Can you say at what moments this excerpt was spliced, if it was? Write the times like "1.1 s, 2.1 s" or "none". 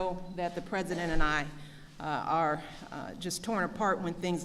1.1 s

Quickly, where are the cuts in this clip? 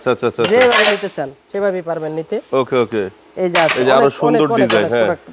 none

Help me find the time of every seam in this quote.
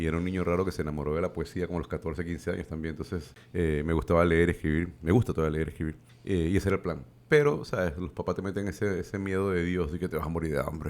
3.4 s, 6.1 s

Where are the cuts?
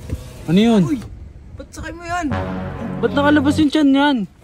2.8 s

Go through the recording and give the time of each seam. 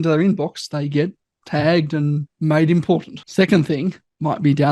3.2 s

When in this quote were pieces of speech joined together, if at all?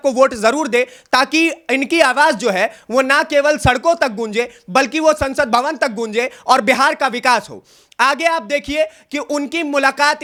none

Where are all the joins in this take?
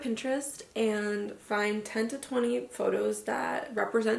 none

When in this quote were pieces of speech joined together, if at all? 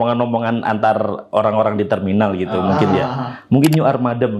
none

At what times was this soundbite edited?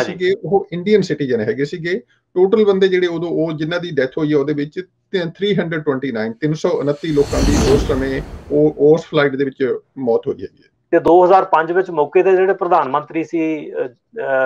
11.0 s

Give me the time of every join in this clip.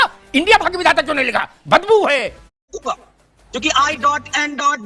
2.7 s

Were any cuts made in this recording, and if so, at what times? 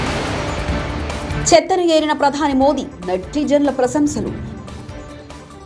1.4 s

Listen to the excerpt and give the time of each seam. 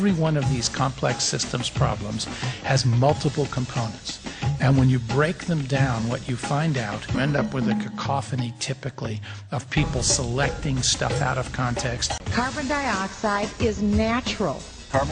none

